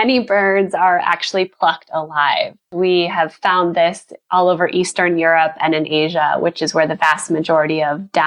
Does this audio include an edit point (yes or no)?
yes